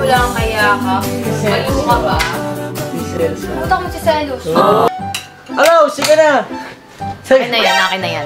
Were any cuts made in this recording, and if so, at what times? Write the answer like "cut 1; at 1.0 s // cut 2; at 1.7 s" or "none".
cut 1; at 4.9 s